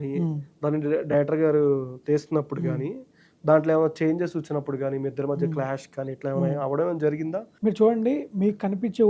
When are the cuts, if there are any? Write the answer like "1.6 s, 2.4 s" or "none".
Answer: 7.5 s